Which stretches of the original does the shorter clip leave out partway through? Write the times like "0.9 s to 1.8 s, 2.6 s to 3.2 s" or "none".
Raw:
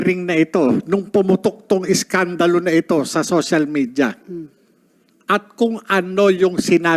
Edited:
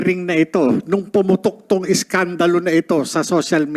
none